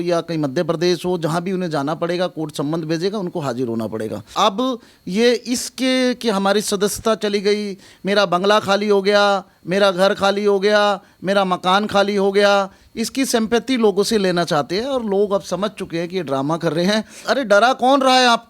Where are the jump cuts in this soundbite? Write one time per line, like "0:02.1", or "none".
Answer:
0:04.3
0:17.2